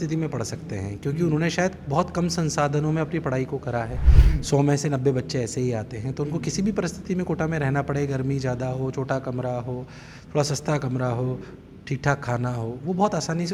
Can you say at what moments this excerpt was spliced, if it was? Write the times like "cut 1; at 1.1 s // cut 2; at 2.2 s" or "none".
none